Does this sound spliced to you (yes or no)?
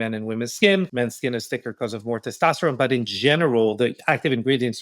yes